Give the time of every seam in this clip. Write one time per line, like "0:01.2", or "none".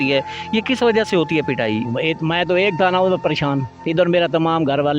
0:01.8